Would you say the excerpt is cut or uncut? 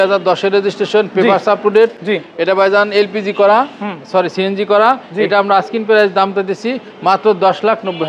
uncut